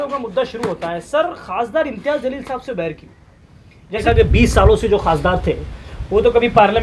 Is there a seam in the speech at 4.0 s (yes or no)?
yes